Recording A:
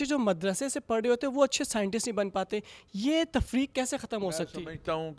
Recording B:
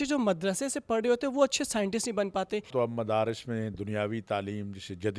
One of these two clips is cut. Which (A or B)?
B